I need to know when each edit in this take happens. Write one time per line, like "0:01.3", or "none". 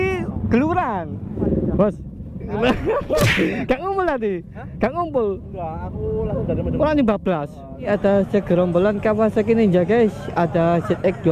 0:01.2
0:07.9

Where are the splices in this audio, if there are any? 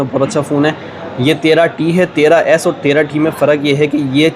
none

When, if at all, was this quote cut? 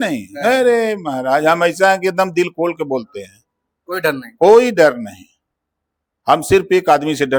none

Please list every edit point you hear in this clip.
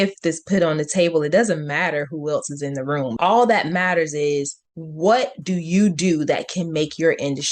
0:03.1

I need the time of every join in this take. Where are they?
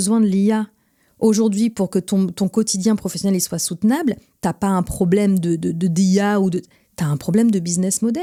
none

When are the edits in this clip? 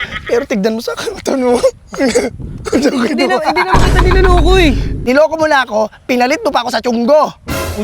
0:04.9

